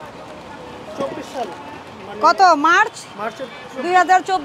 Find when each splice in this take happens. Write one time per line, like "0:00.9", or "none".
none